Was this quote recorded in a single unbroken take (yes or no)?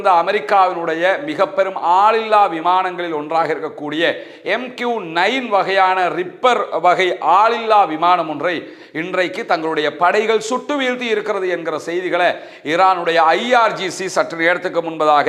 yes